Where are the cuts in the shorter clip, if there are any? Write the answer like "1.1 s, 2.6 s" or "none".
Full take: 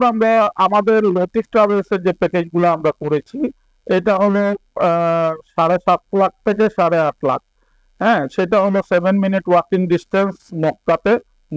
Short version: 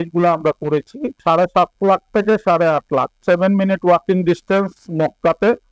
1.1 s, 3.2 s